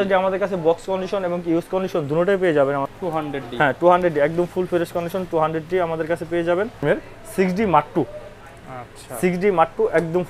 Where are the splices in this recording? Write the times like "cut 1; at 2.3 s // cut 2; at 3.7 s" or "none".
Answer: cut 1; at 2.9 s // cut 2; at 6.8 s